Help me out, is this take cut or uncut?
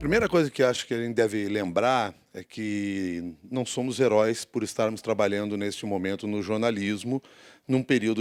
uncut